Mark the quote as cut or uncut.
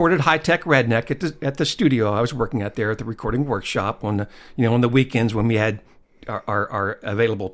uncut